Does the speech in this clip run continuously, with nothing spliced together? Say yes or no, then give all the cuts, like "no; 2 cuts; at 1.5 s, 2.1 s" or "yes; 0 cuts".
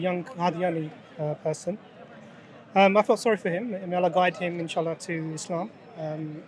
yes; 0 cuts